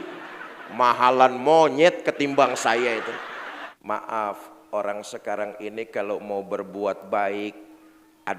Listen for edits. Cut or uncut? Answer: cut